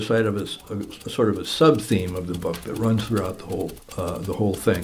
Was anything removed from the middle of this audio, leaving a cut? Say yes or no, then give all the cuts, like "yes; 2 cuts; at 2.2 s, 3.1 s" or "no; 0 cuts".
yes; 1 cut; at 3.8 s